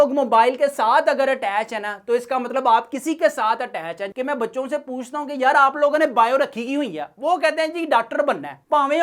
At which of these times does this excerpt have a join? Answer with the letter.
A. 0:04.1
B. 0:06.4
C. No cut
A